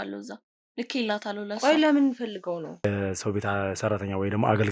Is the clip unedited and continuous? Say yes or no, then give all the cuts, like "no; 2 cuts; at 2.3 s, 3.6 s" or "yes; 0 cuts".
no; 1 cut; at 2.9 s